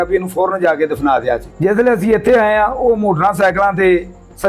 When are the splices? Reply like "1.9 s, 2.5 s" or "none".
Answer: none